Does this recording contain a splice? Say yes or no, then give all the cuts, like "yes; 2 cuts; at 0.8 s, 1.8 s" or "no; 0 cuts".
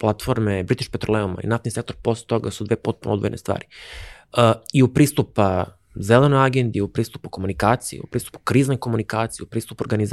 no; 0 cuts